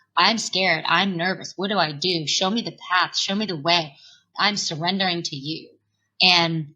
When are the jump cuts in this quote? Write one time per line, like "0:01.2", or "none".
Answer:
0:04.3